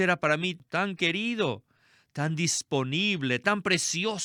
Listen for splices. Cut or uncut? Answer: uncut